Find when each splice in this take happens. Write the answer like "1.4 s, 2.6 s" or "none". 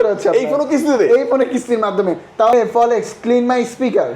2.5 s